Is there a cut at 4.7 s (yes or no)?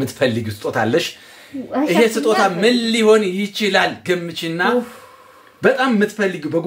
yes